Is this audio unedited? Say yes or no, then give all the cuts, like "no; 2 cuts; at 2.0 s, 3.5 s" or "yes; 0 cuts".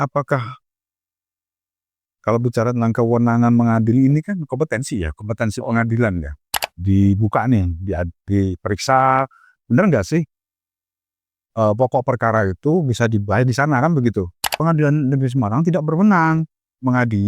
no; 2 cuts; at 6.7 s, 14.4 s